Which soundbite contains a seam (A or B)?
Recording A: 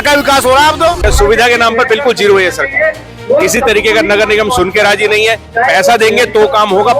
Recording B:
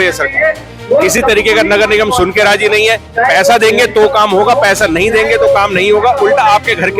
A